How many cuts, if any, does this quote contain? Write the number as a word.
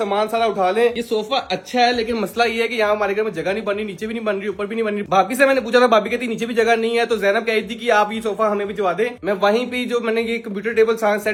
zero